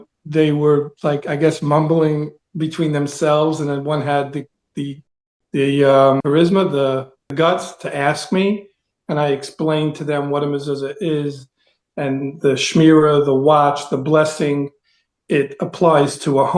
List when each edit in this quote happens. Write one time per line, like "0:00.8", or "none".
none